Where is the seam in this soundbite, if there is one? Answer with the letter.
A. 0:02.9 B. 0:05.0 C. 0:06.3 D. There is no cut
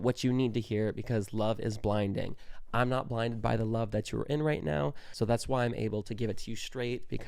B